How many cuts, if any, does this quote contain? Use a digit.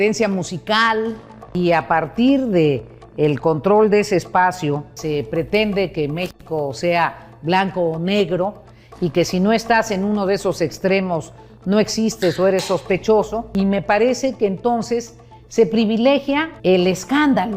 4